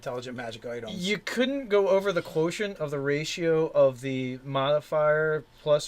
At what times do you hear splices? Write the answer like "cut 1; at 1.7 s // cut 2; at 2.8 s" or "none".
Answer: cut 1; at 2.7 s